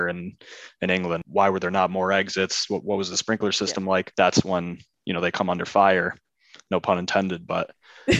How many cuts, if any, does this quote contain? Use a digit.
2